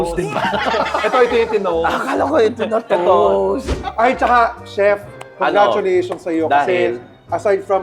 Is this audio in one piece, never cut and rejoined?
no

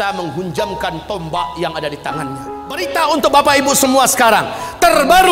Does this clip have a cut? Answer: yes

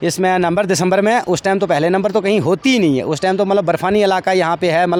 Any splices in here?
no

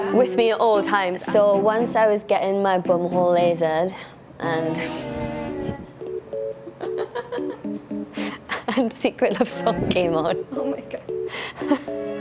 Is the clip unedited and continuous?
no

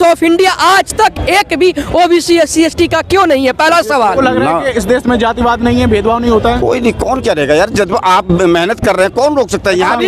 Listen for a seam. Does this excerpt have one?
yes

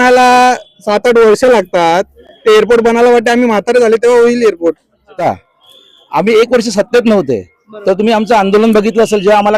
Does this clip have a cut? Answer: yes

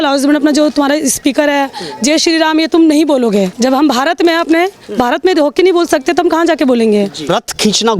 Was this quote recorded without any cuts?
no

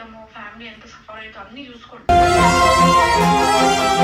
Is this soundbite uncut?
yes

